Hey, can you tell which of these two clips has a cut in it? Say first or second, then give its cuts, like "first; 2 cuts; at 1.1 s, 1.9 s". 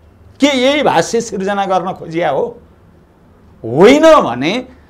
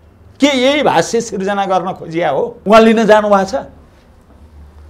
second; 1 cut; at 2.5 s